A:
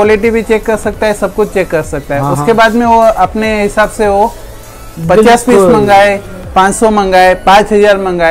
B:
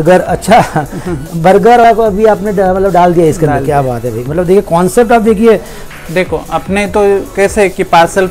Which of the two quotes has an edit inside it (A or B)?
B